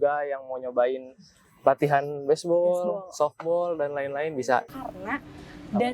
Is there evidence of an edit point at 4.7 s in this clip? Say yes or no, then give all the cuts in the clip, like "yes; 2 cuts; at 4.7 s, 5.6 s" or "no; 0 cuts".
yes; 1 cut; at 4.7 s